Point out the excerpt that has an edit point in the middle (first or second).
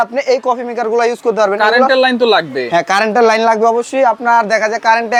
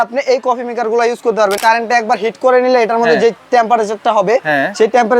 second